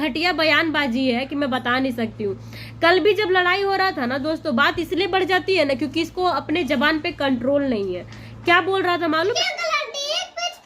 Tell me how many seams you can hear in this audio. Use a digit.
1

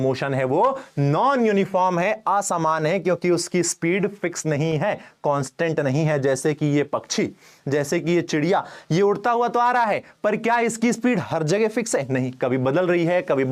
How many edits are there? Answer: 0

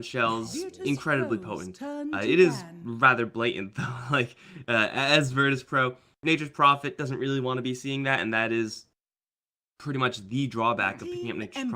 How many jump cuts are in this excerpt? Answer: 1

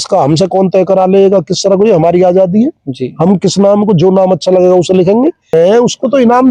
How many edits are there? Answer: 1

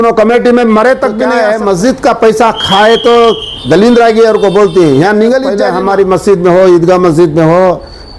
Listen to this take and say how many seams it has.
2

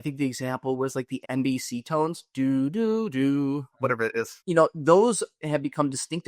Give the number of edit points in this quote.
2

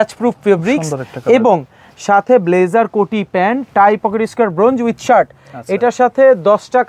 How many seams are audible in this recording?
0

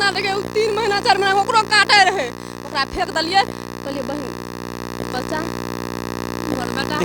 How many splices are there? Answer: 0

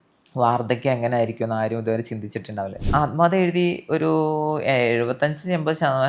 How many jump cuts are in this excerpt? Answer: 1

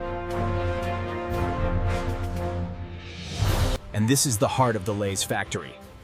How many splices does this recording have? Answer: 1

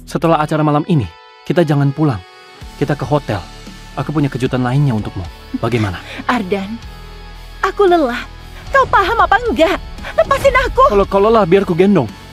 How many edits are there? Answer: 0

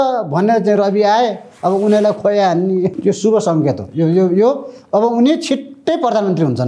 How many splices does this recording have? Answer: 1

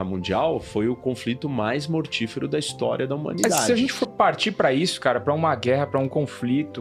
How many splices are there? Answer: 1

